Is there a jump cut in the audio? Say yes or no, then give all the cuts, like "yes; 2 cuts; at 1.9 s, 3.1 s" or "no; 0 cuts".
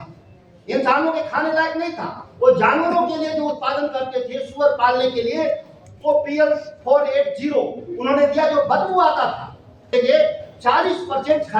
yes; 1 cut; at 9.9 s